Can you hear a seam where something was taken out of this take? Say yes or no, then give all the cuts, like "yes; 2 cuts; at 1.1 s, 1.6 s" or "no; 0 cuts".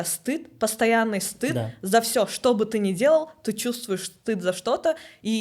no; 0 cuts